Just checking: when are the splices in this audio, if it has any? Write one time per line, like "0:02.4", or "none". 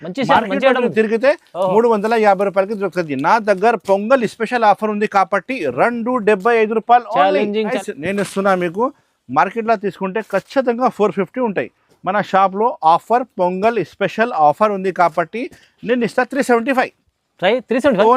0:07.8